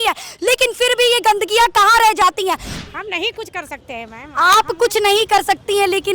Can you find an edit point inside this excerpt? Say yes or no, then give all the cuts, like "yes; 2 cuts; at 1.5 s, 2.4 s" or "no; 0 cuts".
yes; 1 cut; at 2.7 s